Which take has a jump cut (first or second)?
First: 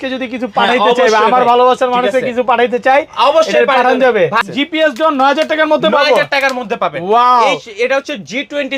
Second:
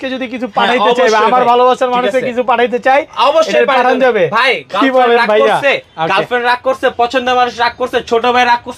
first